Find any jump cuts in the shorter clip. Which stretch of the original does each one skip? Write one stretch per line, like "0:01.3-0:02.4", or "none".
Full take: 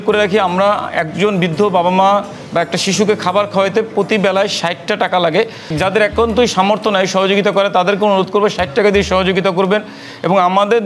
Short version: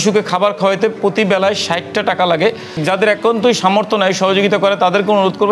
none